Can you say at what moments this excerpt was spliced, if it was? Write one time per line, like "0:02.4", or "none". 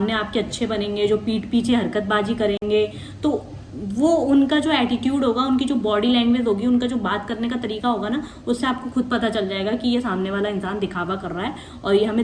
none